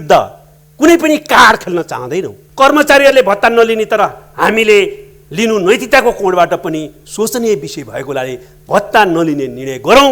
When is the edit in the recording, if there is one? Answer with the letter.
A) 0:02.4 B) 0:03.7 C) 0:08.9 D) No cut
A